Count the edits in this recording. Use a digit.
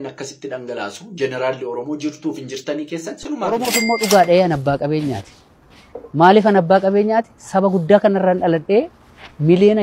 1